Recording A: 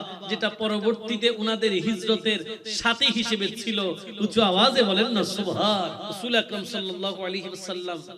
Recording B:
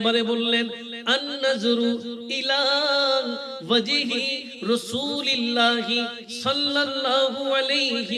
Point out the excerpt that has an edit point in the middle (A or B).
A